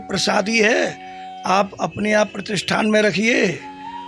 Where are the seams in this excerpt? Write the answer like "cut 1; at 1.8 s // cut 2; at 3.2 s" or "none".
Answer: none